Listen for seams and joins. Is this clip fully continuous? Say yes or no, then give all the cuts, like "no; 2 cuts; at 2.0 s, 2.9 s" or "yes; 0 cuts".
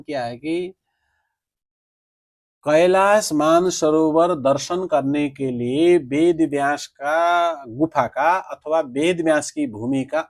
yes; 0 cuts